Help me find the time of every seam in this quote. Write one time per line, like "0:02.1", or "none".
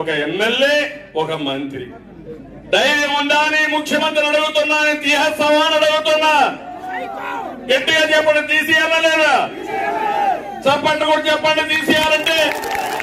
none